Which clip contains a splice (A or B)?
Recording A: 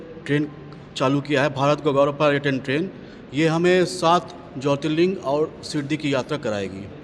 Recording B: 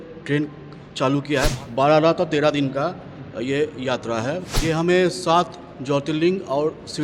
B